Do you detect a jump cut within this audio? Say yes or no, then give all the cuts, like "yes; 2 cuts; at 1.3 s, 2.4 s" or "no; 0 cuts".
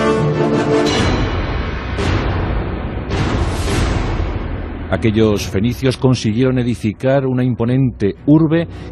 no; 0 cuts